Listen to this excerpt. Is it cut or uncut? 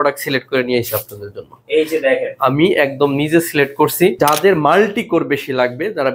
cut